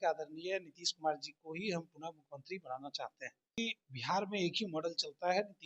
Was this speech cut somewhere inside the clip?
yes; 1 cut; at 3.6 s

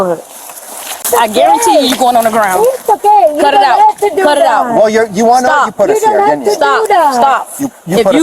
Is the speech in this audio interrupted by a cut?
yes; 1 cut; at 1.0 s

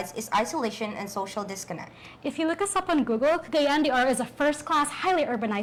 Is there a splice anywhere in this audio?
no; 0 cuts

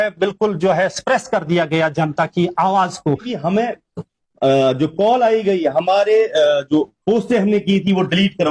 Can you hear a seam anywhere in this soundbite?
yes; 1 cut; at 3.3 s

